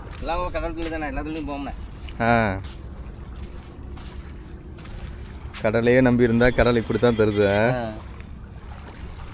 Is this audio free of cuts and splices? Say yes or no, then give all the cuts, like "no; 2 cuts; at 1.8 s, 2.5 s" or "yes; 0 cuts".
yes; 0 cuts